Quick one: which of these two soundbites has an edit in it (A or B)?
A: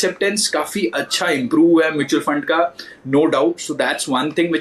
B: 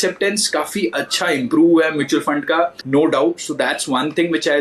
B